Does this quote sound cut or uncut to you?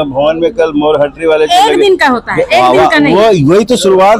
uncut